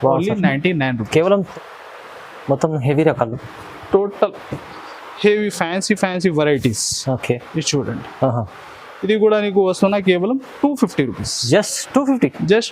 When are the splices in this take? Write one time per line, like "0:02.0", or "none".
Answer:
0:01.5